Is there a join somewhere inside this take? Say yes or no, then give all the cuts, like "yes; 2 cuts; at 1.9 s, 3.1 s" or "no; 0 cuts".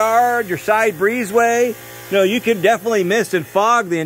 no; 0 cuts